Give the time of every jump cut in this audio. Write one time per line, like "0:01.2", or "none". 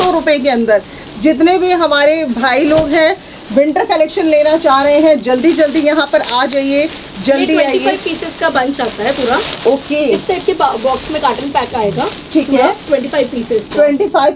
none